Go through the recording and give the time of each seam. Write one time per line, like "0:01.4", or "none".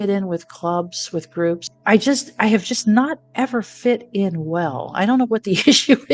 0:01.7